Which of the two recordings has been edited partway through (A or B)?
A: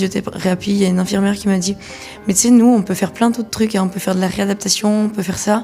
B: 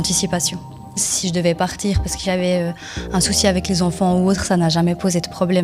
B